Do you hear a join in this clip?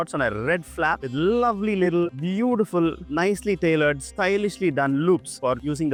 no; 0 cuts

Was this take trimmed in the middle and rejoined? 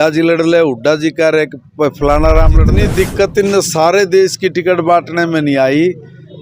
yes; 1 cut; at 2.7 s

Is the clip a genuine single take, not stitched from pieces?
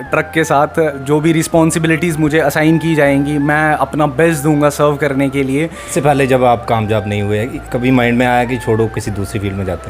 no; 2 cuts; at 1.0 s, 5.8 s

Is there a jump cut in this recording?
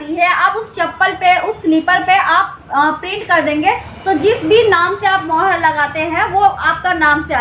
no; 0 cuts

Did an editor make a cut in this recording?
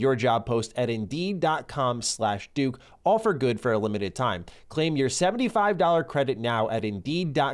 no; 0 cuts

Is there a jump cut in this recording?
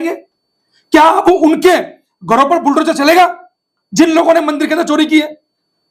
no; 0 cuts

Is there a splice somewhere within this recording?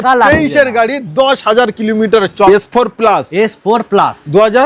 yes; 1 cut; at 2.5 s

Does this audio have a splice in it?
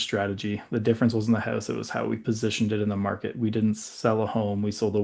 no; 0 cuts

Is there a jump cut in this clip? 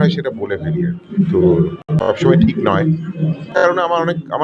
yes; 2 cuts; at 1.8 s, 3.5 s

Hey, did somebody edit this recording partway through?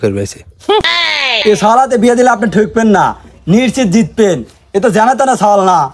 yes; 1 cut; at 1.2 s

